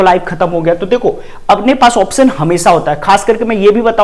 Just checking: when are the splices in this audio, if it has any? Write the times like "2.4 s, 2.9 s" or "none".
none